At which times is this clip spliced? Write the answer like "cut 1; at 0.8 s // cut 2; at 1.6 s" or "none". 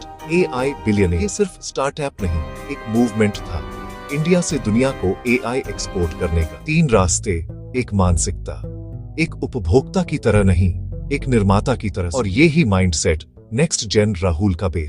cut 1; at 1.2 s // cut 2; at 6.6 s // cut 3; at 12.0 s